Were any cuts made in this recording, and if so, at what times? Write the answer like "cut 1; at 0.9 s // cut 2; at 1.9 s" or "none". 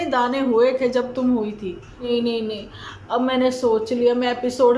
cut 1; at 2.1 s